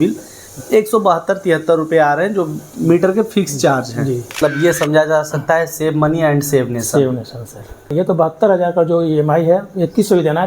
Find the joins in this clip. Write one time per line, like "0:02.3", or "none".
0:04.4
0:07.9